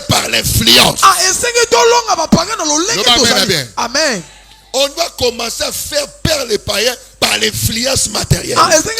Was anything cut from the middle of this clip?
no; 0 cuts

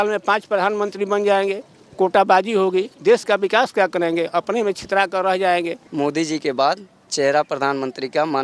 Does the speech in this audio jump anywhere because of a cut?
yes; 2 cuts; at 5.8 s, 7.1 s

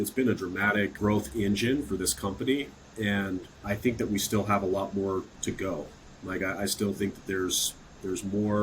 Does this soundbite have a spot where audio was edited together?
yes; 3 cuts; at 0.9 s, 3.5 s, 5.3 s

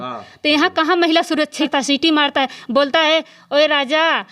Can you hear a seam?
yes; 1 cut; at 1.7 s

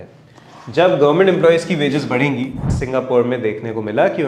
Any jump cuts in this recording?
yes; 1 cut; at 2.7 s

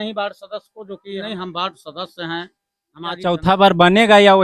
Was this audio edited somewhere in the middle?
yes; 2 cuts; at 1.2 s, 3.3 s

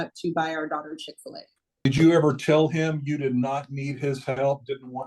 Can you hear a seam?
yes; 1 cut; at 1.9 s

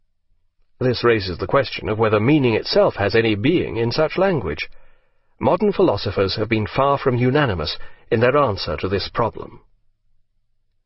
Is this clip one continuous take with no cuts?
no; 1 cut; at 2.8 s

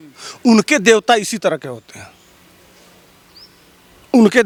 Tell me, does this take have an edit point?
no; 0 cuts

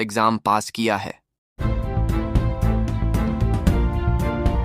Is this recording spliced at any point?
yes; 1 cut; at 1.2 s

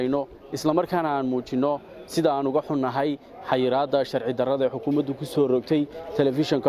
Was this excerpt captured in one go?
yes; 0 cuts

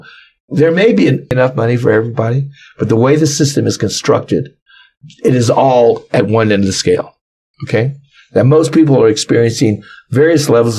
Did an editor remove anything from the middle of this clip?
yes; 1 cut; at 1.3 s

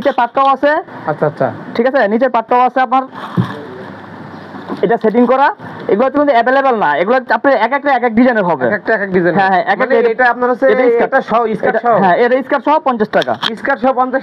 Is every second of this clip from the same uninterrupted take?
yes; 0 cuts

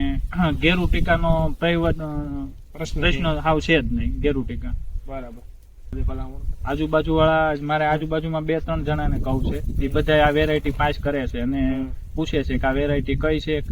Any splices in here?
yes; 1 cut; at 5.9 s

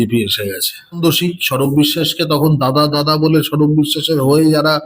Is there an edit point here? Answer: yes; 1 cut; at 1.0 s

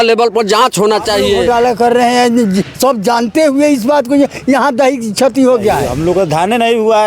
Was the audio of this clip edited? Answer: yes; 2 cuts; at 1.4 s, 5.9 s

